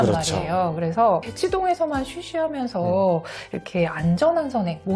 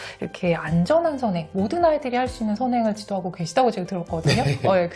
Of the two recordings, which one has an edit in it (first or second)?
first